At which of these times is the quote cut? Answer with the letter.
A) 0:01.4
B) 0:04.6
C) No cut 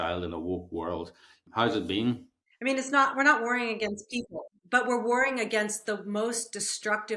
A